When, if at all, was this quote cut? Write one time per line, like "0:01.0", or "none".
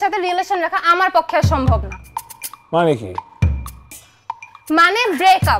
none